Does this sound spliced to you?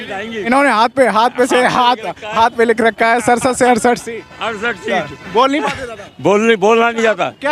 no; 0 cuts

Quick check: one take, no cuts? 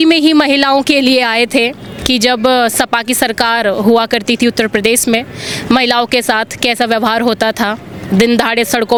yes; 0 cuts

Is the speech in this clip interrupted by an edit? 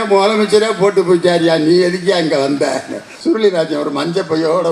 yes; 1 cut; at 3.1 s

